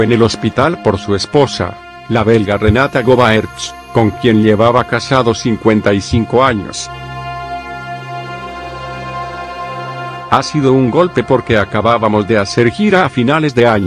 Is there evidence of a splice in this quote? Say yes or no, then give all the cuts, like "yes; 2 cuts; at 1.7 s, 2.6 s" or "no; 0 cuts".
yes; 2 cuts; at 6.8 s, 10.2 s